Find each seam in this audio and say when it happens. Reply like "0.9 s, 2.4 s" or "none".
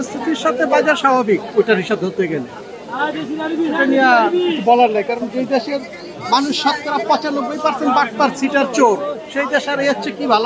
none